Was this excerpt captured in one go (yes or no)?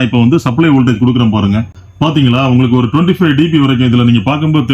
no